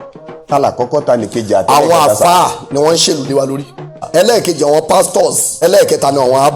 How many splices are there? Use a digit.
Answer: 2